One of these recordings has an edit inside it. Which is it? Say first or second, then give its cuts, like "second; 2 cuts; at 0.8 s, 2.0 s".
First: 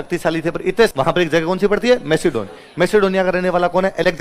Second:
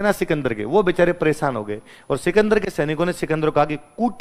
first; 1 cut; at 0.9 s